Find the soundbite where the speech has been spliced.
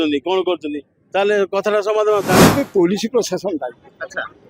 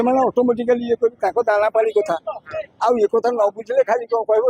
first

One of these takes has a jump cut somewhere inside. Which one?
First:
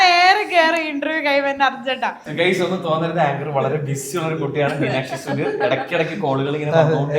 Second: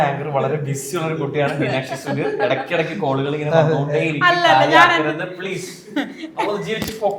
first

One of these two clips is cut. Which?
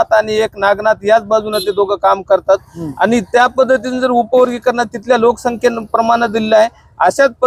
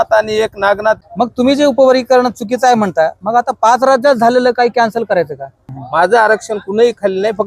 second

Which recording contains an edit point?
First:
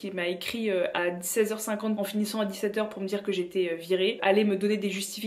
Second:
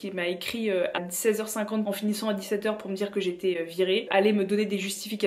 second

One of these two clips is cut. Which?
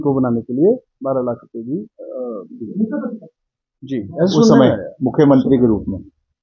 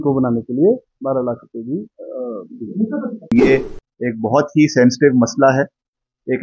second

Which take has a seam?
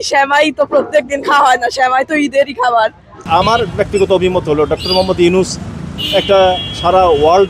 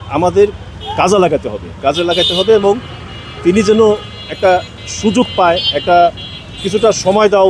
first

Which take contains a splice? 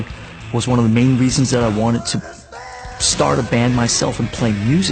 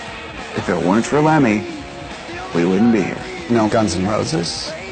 second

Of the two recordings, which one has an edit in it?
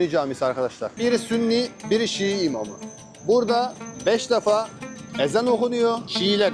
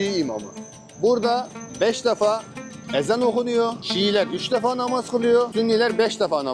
first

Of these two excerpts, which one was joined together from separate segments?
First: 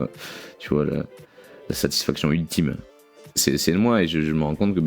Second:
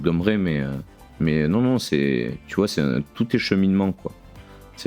first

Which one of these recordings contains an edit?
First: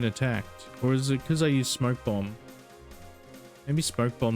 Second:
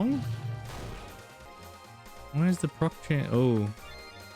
second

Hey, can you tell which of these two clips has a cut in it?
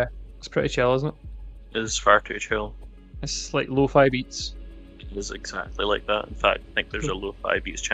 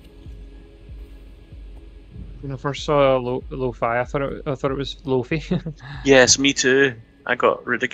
second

